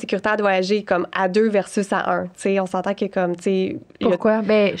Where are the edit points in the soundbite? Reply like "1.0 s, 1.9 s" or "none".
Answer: none